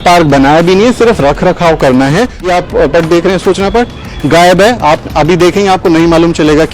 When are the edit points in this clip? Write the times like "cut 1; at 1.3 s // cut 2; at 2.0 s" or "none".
cut 1; at 2.5 s